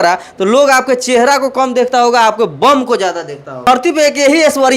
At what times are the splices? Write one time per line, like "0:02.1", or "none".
0:03.7